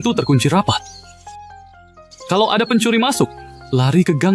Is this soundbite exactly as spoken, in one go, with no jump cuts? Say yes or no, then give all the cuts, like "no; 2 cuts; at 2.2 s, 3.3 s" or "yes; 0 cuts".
no; 2 cuts; at 0.8 s, 2.3 s